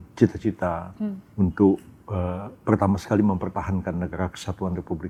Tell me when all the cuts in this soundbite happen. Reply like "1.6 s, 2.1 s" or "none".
none